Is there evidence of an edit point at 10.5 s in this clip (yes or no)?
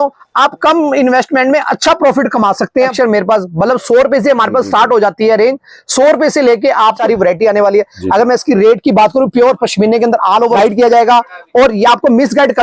yes